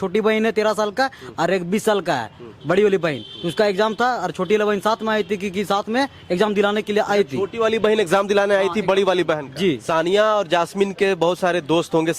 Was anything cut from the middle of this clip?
yes; 1 cut; at 9.8 s

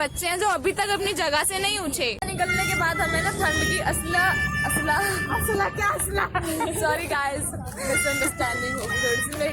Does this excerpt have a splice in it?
no; 0 cuts

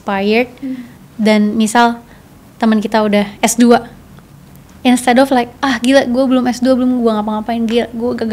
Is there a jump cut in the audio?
no; 0 cuts

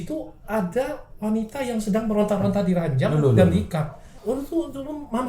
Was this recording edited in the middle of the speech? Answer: yes; 1 cut; at 4.0 s

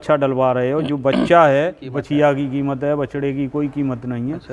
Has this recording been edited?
yes; 1 cut; at 1.9 s

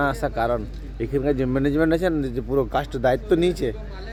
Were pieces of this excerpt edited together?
no; 0 cuts

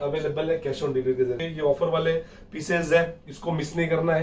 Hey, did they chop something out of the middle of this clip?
yes; 1 cut; at 1.4 s

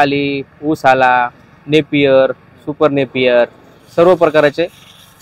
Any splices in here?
no; 0 cuts

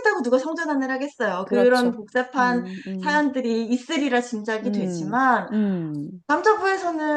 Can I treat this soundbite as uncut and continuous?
yes; 0 cuts

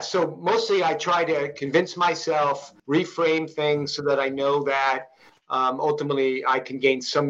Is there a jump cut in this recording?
yes; 1 cut; at 2.7 s

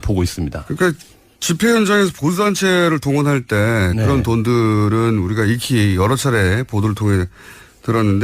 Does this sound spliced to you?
yes; 1 cut; at 6.7 s

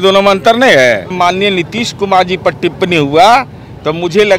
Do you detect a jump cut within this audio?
yes; 1 cut; at 1.1 s

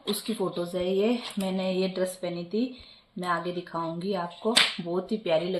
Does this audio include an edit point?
no; 0 cuts

